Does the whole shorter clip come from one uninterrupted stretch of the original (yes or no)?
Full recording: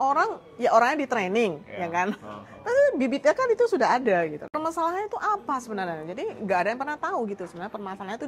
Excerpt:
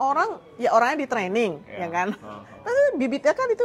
yes